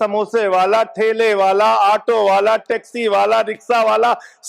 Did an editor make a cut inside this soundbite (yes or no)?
no